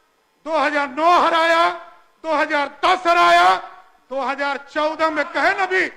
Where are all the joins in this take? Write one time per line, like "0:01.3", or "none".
none